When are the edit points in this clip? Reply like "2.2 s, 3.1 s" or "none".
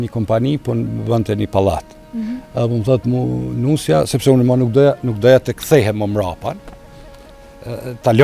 none